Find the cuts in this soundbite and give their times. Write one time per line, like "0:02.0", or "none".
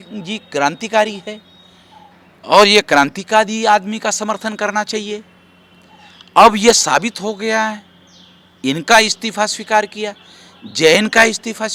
none